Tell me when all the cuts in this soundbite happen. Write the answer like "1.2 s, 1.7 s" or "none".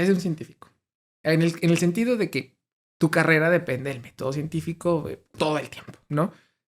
5.3 s